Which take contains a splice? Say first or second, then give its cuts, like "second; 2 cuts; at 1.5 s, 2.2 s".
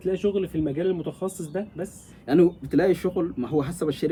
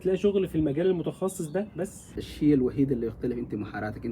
second; 1 cut; at 2.1 s